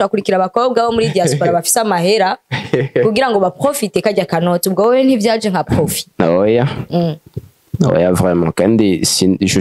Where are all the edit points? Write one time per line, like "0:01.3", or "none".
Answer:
none